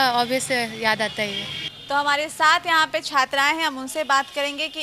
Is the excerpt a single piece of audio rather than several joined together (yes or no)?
yes